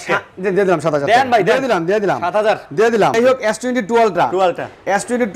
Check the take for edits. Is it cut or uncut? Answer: cut